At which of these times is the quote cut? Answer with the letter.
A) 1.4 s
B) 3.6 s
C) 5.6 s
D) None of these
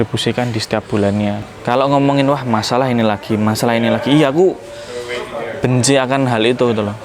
A